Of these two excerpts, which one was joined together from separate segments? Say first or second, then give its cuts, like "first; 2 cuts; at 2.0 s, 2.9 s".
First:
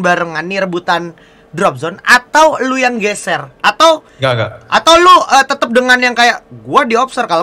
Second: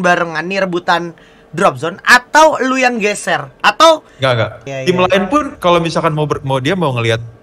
second; 1 cut; at 4.6 s